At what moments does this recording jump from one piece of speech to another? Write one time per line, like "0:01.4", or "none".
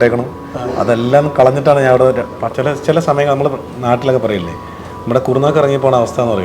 0:02.3